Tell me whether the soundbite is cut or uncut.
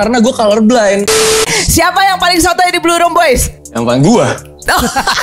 cut